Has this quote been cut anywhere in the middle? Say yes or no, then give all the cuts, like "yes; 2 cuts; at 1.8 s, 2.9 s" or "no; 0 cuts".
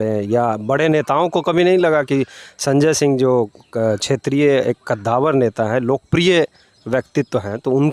no; 0 cuts